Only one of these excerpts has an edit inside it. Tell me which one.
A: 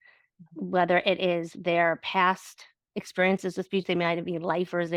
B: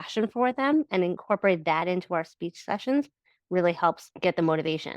B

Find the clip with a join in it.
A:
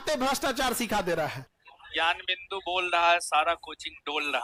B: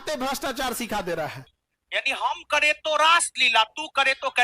B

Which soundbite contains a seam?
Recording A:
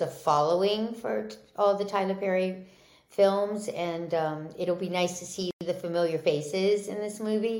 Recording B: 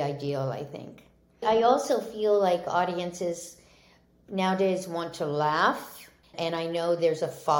B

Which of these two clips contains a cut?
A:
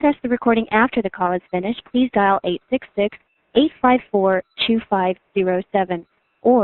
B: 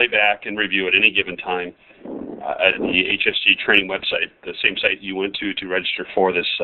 A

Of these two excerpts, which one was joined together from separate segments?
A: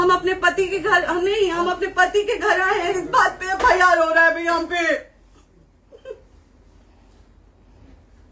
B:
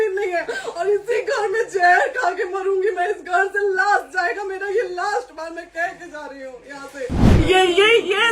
B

